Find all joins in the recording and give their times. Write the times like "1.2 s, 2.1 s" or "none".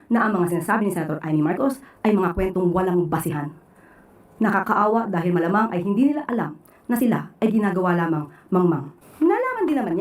9.0 s